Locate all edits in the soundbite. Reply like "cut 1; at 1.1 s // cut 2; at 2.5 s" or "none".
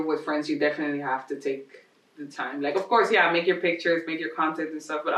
none